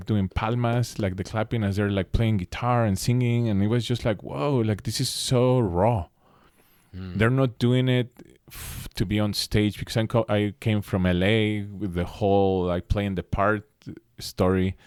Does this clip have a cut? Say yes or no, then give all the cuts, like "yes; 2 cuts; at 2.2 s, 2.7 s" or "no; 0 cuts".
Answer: no; 0 cuts